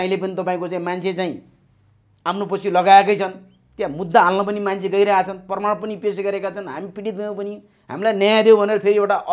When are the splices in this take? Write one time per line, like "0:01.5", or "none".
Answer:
none